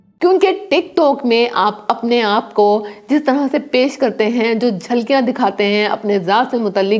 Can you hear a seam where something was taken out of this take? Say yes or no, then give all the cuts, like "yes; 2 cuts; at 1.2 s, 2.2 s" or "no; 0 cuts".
no; 0 cuts